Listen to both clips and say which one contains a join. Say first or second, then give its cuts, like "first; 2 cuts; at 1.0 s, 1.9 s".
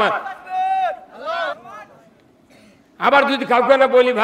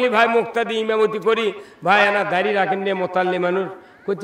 first; 1 cut; at 1.5 s